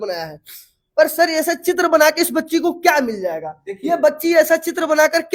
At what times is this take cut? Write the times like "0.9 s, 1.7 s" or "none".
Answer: none